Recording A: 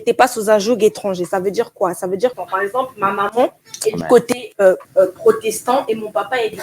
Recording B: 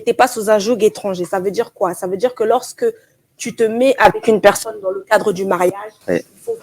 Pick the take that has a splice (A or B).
A